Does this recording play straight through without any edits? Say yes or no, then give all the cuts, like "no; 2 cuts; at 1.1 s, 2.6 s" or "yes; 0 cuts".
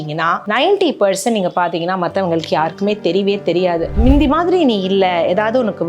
no; 1 cut; at 3.9 s